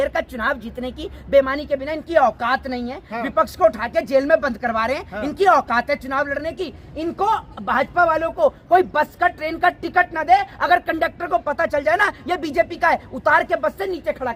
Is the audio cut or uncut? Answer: uncut